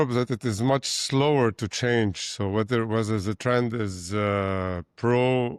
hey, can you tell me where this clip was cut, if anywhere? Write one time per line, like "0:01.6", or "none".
none